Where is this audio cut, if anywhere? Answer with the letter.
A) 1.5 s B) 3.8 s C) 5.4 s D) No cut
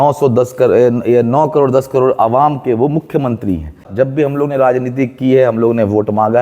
B